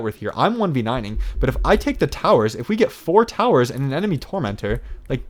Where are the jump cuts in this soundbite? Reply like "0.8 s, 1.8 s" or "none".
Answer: none